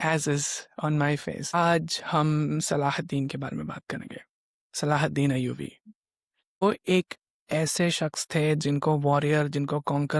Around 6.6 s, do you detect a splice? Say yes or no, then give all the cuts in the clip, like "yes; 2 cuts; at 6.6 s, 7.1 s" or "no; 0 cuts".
yes; 2 cuts; at 1.5 s, 6.6 s